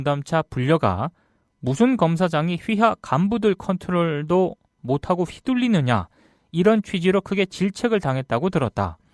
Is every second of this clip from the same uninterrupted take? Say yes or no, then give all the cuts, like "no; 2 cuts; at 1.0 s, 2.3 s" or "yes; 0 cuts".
no; 1 cut; at 4.1 s